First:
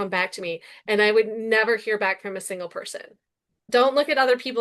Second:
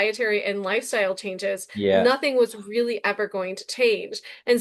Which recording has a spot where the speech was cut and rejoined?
first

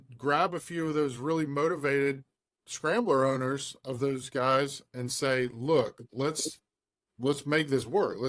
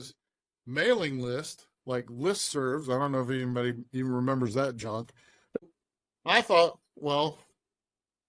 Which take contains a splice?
second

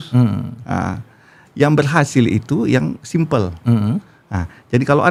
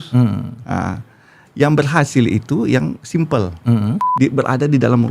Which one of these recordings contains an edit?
second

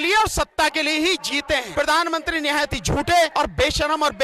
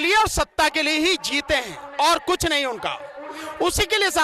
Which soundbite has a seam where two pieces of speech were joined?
first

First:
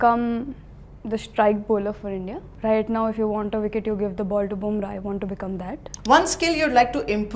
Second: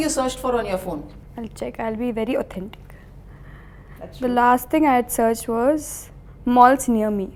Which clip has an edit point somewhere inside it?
first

